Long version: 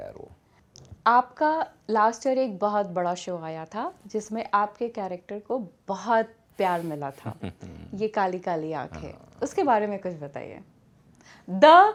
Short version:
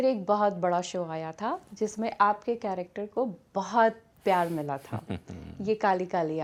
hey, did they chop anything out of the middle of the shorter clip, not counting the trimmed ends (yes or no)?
no